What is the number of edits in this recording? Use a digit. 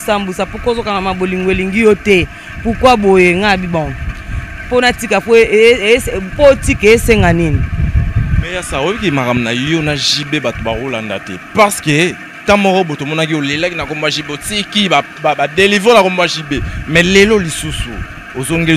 0